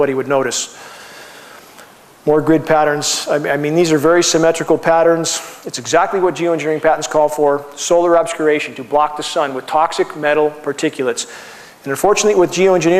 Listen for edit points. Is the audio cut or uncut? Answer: uncut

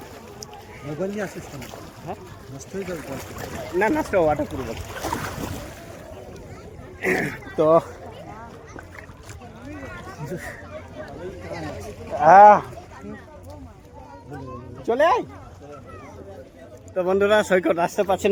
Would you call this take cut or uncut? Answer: uncut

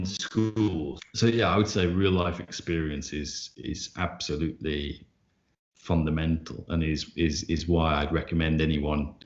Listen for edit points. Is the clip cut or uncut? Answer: cut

